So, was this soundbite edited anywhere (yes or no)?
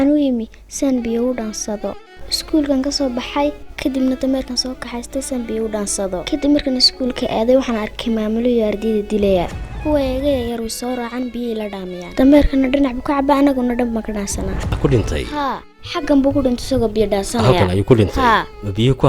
yes